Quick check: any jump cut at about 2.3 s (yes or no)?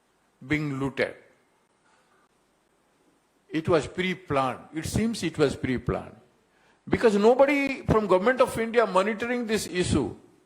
yes